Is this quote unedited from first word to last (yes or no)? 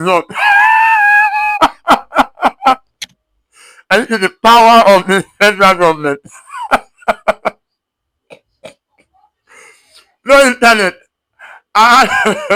yes